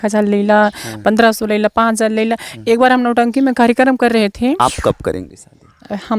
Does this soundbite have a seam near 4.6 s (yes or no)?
yes